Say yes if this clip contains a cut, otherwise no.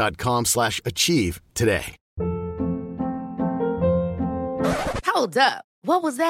yes